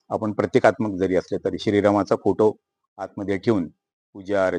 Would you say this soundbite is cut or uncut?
uncut